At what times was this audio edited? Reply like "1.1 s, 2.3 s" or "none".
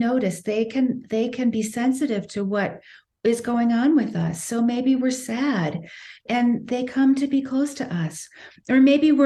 6.2 s